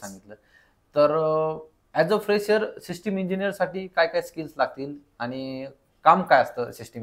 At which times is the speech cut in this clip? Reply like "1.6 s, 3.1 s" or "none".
none